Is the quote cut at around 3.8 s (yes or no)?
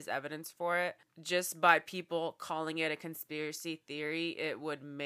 no